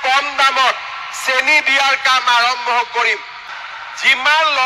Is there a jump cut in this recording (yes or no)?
yes